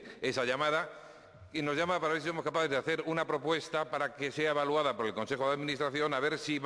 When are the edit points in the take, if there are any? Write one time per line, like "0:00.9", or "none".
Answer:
0:01.7